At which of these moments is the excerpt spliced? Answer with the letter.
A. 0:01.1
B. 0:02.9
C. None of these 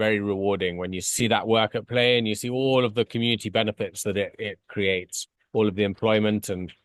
A